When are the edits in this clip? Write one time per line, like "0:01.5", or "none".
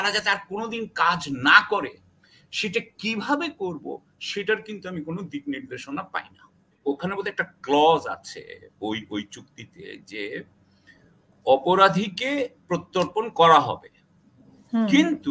0:06.8